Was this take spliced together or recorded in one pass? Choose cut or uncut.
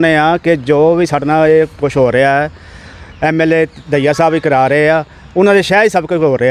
uncut